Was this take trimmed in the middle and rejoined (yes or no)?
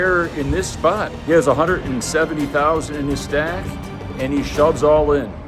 no